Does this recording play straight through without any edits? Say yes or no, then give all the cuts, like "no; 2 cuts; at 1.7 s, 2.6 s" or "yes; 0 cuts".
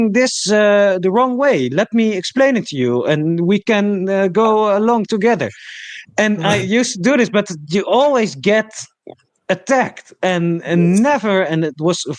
yes; 0 cuts